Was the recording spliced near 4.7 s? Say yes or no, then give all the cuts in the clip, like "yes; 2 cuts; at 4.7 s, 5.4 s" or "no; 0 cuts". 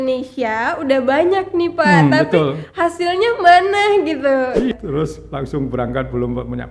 yes; 1 cut; at 4.7 s